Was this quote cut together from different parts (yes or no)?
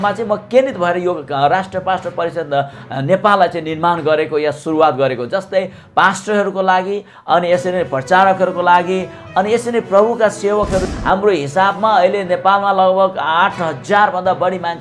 yes